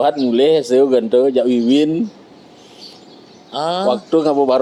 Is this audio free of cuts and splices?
yes; 0 cuts

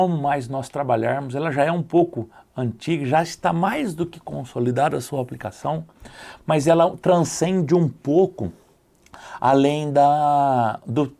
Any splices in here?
no; 0 cuts

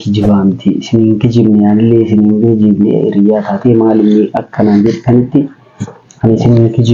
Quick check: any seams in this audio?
no; 0 cuts

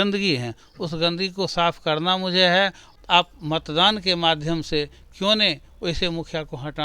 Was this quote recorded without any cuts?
no; 1 cut; at 2.9 s

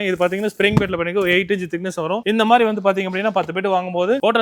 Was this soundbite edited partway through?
no; 0 cuts

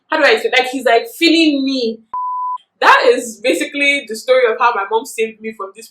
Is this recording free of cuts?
no; 1 cut; at 2.4 s

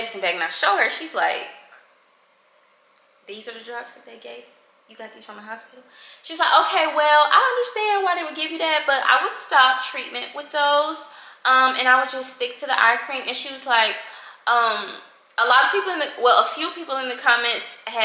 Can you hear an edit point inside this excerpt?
no; 0 cuts

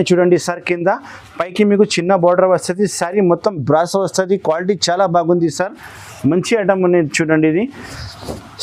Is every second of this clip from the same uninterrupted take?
yes; 0 cuts

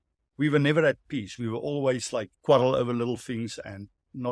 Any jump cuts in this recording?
no; 0 cuts

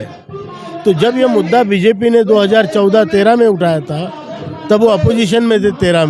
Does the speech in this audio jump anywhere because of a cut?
no; 0 cuts

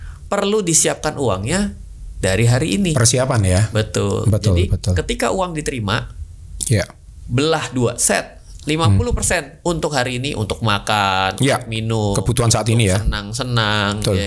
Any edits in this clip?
no; 0 cuts

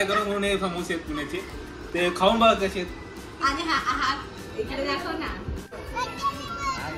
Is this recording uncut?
no; 1 cut; at 5.7 s

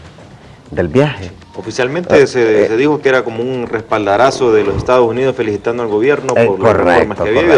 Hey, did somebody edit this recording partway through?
no; 0 cuts

